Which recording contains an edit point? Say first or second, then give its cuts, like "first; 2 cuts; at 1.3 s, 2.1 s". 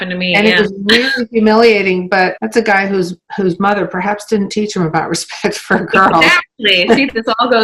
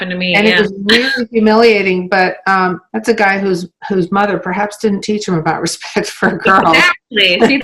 first; 1 cut; at 2.4 s